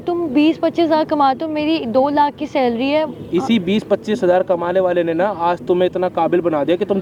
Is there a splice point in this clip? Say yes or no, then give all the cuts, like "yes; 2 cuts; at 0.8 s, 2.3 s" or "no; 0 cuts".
no; 0 cuts